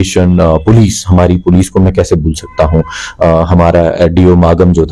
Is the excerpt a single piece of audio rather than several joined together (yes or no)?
yes